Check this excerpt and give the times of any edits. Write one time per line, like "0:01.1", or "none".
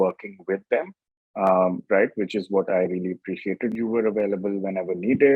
0:03.7